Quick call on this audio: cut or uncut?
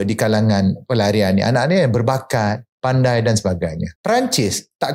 uncut